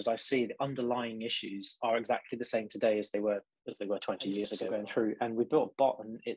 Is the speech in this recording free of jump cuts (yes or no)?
no